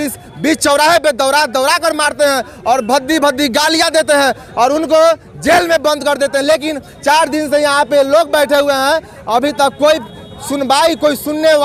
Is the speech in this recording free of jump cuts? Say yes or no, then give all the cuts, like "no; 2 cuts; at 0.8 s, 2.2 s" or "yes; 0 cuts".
yes; 0 cuts